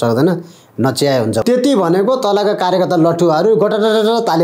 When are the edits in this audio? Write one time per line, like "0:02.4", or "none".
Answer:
0:01.4